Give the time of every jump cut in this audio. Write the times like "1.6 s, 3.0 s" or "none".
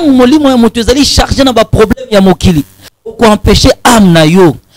none